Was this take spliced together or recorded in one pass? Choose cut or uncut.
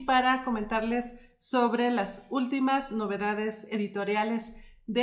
cut